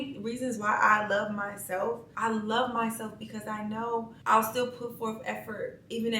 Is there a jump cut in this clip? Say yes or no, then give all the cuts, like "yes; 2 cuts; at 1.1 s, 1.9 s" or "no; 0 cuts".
yes; 1 cut; at 2.1 s